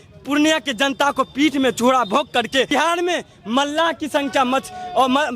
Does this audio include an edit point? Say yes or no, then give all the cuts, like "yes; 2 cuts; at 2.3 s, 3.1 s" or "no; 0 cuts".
yes; 1 cut; at 2.7 s